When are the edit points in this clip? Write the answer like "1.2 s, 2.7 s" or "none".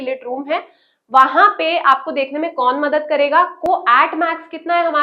3.6 s